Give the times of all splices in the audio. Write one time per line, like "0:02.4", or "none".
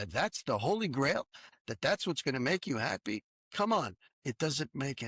0:01.5
0:03.4
0:04.1